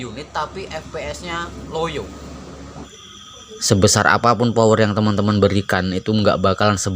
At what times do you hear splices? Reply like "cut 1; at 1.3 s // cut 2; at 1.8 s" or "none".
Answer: cut 1; at 2.7 s